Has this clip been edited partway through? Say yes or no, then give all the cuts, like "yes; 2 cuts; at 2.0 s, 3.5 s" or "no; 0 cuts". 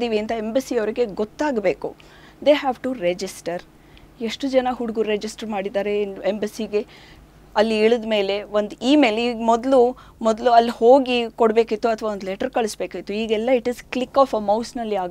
no; 0 cuts